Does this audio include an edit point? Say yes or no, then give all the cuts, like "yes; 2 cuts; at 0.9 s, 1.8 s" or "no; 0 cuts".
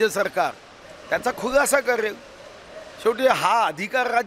no; 0 cuts